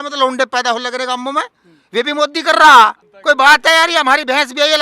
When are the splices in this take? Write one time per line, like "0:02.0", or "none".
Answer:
0:03.1